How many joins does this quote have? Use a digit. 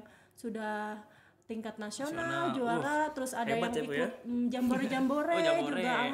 0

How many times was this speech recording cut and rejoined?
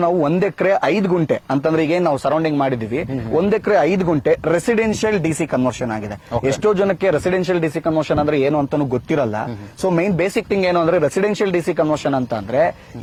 0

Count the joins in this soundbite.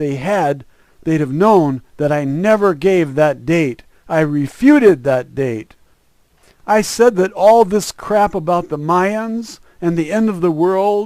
1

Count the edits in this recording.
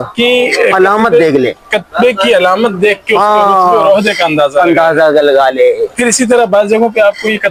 0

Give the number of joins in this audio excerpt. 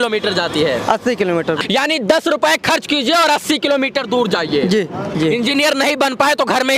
2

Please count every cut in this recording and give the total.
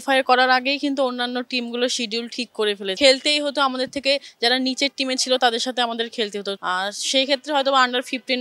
2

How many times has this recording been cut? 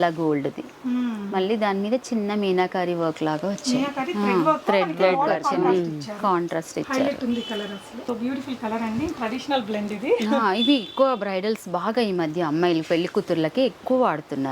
1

